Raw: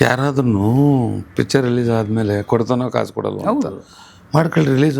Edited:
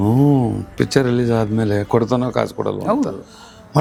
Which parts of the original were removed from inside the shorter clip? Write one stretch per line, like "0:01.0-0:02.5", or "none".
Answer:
none